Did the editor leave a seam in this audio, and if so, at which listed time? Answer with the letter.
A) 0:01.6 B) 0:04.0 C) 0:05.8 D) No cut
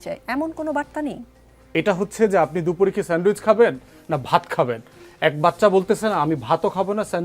A